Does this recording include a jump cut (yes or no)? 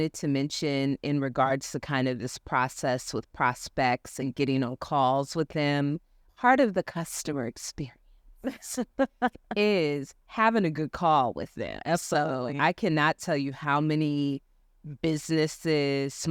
yes